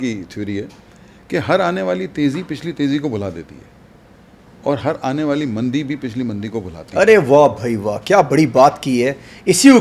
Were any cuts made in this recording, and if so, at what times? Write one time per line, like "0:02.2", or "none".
none